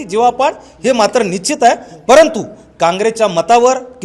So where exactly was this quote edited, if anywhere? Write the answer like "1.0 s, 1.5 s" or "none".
none